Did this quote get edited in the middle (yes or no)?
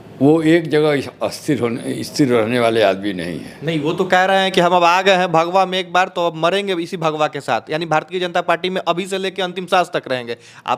no